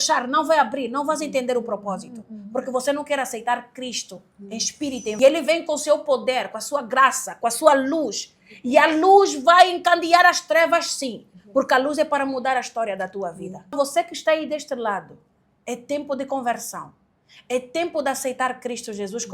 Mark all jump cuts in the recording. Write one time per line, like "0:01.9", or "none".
0:05.2
0:13.7